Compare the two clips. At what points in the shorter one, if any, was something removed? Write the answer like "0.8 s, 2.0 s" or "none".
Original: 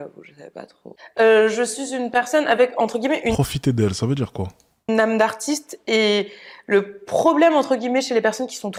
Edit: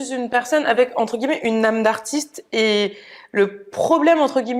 1.5 s